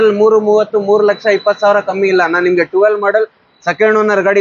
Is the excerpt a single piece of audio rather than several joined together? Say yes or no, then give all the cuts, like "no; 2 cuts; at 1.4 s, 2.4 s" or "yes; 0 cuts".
yes; 0 cuts